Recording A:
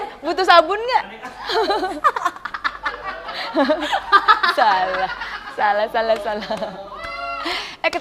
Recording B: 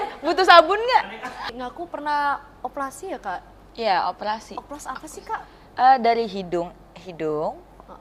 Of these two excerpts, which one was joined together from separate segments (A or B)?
B